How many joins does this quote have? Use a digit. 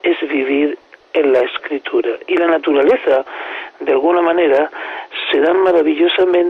0